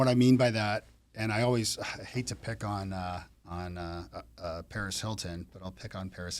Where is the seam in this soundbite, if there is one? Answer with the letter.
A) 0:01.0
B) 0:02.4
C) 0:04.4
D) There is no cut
D